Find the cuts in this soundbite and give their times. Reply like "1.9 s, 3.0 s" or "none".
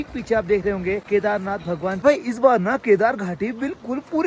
1.4 s